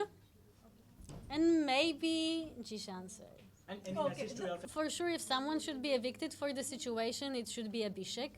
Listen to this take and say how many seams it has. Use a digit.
1